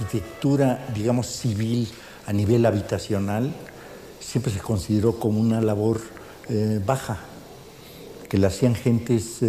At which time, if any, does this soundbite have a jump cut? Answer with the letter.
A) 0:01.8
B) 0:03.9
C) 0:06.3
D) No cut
A